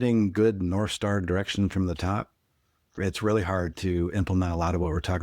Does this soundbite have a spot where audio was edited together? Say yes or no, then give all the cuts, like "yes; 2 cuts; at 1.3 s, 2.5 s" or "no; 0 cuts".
yes; 2 cuts; at 2.9 s, 3.8 s